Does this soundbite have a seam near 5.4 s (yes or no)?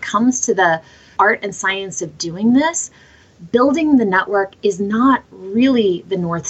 no